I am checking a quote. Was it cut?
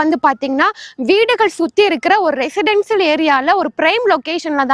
no; 0 cuts

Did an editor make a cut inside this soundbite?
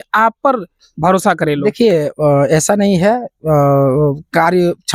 no; 0 cuts

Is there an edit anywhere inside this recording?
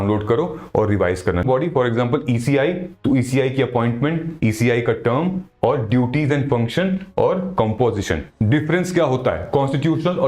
yes; 2 cuts; at 1.4 s, 8.3 s

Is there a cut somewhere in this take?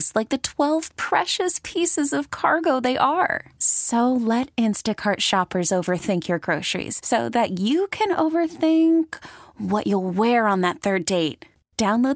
no; 0 cuts

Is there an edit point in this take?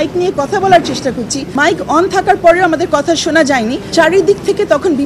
yes; 2 cuts; at 1.4 s, 3.9 s

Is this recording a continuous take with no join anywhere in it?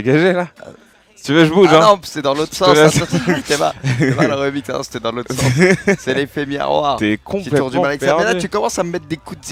yes; 0 cuts

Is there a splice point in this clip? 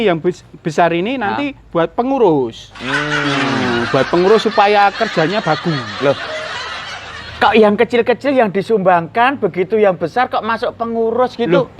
no; 0 cuts

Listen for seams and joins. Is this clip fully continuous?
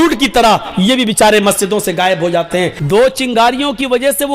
no; 1 cut; at 2.8 s

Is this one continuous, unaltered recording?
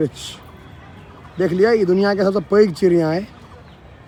yes; 0 cuts

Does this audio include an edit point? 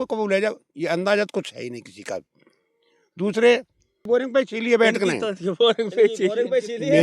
yes; 1 cut; at 4.1 s

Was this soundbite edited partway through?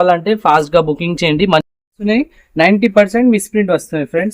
yes; 1 cut; at 1.9 s

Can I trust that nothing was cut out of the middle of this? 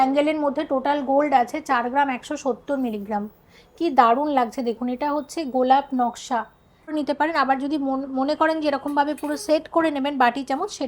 no; 1 cut; at 6.9 s

